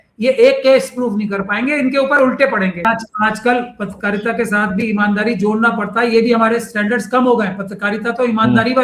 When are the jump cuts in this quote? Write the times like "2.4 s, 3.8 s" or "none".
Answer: 2.8 s